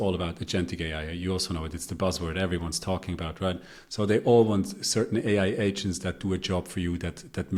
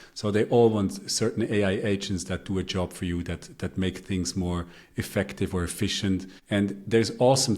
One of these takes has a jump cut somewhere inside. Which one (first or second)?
second